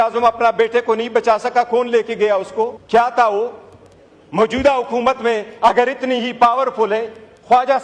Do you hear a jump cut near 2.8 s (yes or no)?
yes